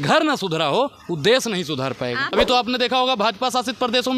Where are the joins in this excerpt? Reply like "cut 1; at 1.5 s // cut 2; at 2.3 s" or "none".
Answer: cut 1; at 2.3 s

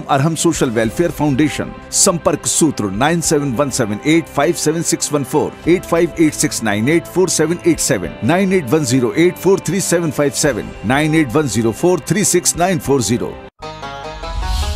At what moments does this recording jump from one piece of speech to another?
cut 1; at 13.5 s

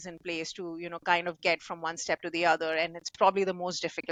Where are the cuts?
none

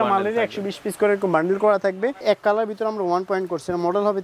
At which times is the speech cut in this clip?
cut 1; at 2.2 s

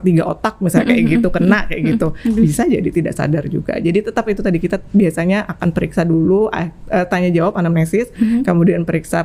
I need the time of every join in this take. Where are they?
none

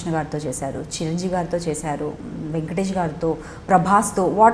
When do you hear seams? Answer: none

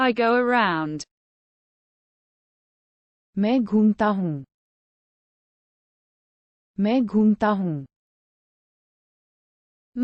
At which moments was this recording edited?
none

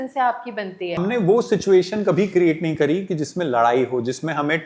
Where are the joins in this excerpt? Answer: cut 1; at 1.0 s

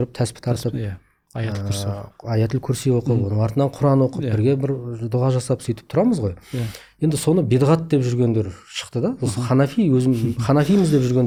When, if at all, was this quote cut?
none

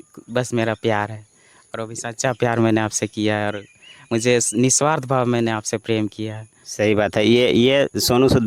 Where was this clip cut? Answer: none

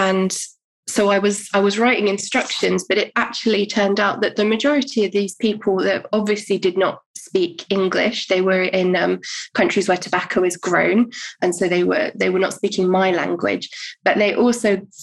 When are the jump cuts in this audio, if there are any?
none

